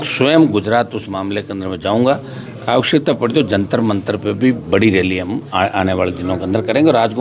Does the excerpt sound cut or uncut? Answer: uncut